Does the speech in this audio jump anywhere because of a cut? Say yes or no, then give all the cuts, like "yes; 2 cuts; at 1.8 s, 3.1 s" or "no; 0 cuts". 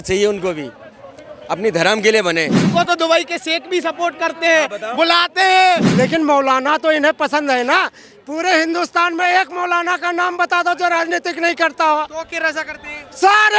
yes; 2 cuts; at 2.7 s, 5.9 s